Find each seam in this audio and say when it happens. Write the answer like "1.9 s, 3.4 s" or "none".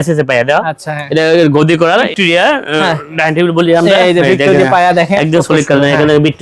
2.1 s, 5.1 s